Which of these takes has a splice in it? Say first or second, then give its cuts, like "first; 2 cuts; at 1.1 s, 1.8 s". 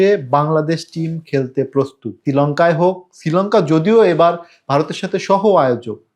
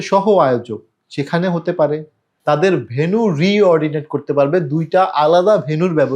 second; 1 cut; at 2.4 s